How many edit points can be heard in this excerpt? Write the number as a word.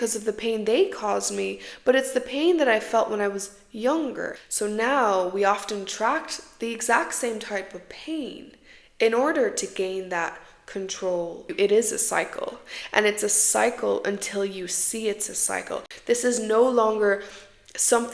three